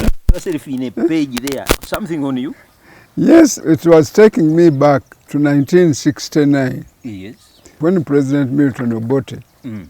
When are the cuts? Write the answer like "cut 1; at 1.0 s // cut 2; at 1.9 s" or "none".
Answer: cut 1; at 3.6 s // cut 2; at 5.2 s // cut 3; at 7.7 s